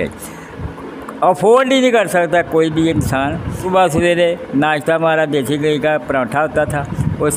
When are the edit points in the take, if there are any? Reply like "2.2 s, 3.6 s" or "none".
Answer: 3.6 s